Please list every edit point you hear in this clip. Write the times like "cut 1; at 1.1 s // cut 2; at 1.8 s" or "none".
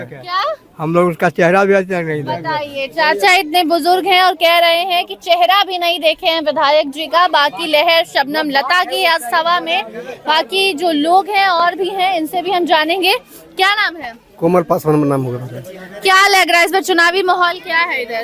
none

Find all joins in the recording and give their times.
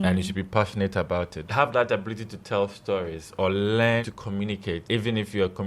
cut 1; at 1.5 s // cut 2; at 4.1 s

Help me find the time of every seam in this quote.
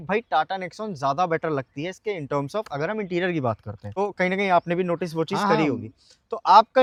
none

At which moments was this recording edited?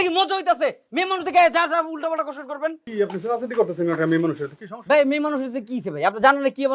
cut 1; at 2.8 s

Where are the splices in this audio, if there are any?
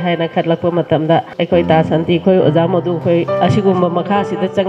cut 1; at 1.3 s // cut 2; at 3.3 s

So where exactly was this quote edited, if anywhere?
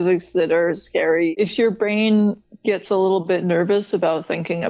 cut 1; at 1.3 s // cut 2; at 2.5 s

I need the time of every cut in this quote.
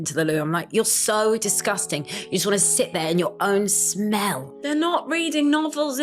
none

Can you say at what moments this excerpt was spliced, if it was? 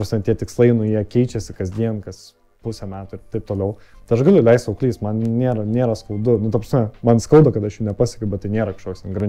none

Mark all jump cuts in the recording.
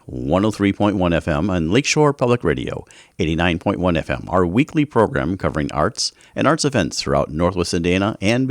none

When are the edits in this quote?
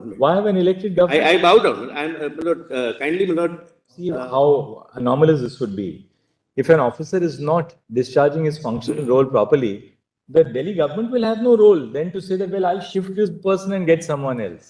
cut 1; at 4.1 s

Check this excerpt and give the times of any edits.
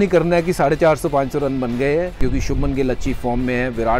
cut 1; at 2.2 s

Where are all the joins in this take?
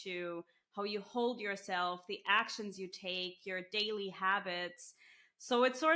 none

